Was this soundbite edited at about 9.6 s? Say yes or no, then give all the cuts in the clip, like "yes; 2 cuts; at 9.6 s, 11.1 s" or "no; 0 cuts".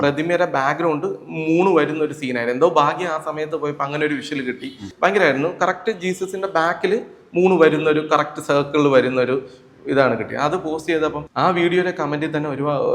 no; 2 cuts; at 4.9 s, 11.2 s